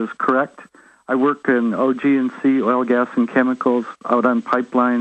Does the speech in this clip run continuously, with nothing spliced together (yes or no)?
yes